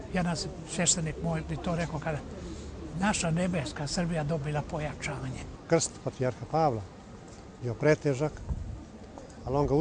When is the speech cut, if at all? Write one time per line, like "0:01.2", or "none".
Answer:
0:05.5